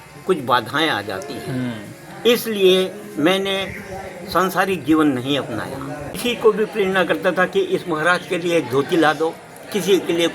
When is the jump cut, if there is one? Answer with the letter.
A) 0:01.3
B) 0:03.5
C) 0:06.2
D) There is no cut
C